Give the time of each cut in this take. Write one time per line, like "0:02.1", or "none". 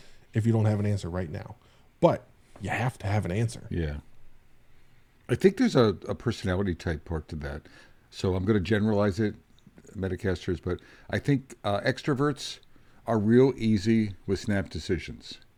none